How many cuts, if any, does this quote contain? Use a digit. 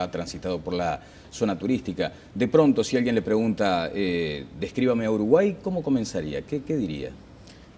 0